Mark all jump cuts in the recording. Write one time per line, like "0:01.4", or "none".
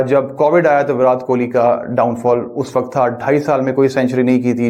none